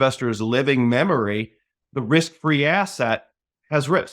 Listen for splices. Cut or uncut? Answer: cut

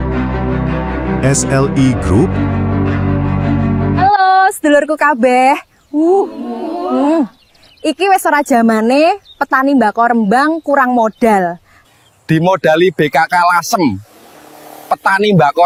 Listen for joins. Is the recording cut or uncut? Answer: uncut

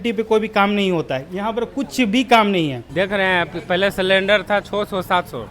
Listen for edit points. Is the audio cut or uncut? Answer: cut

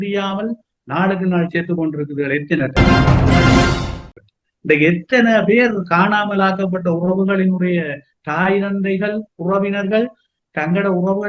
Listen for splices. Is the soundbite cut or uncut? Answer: cut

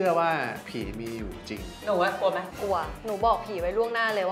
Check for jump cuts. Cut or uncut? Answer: cut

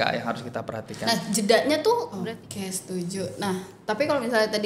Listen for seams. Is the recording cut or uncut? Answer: cut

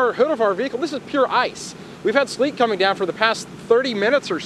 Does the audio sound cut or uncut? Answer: uncut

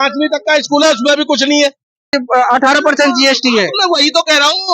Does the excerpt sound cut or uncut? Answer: cut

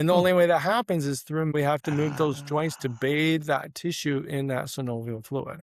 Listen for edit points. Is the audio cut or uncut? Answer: cut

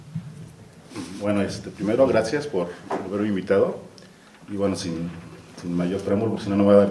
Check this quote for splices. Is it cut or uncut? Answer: cut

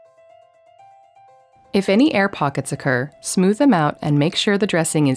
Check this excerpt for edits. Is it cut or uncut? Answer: cut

